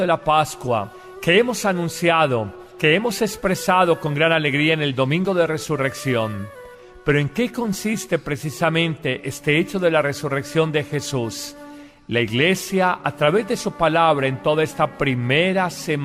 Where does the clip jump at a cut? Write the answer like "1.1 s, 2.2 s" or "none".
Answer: 5.2 s